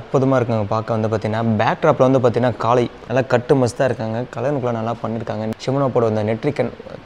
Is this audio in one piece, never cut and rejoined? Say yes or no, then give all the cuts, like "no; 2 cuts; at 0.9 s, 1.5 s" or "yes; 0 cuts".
no; 2 cuts; at 3.0 s, 5.5 s